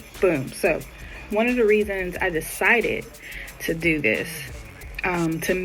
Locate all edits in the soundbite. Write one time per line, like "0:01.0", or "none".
none